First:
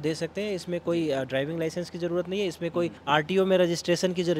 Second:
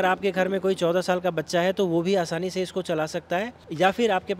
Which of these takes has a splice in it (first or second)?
first